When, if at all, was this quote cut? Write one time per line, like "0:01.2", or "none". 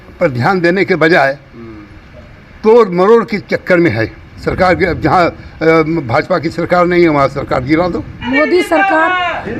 0:04.3
0:08.2